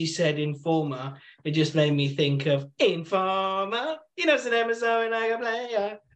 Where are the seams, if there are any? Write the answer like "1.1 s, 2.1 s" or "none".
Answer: none